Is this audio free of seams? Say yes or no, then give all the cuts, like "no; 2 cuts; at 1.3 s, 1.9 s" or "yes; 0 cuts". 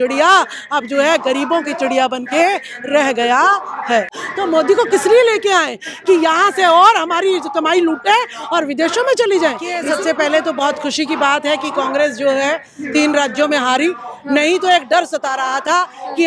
no; 2 cuts; at 4.2 s, 9.8 s